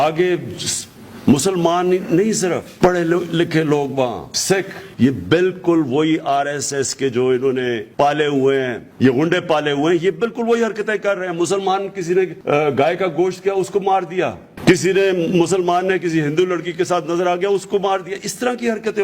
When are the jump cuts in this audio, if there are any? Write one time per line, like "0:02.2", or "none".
0:04.8
0:07.8
0:08.8
0:12.4